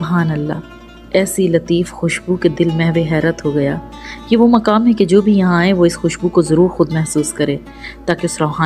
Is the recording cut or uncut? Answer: uncut